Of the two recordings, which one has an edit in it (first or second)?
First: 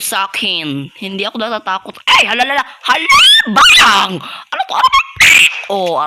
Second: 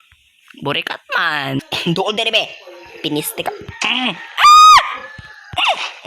second